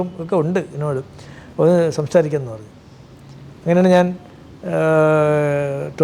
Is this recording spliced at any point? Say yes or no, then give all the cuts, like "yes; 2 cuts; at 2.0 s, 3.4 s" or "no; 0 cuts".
no; 0 cuts